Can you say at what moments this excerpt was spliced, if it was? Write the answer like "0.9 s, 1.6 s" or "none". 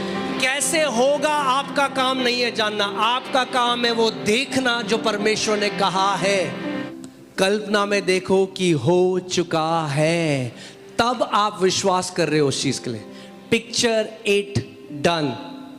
6.8 s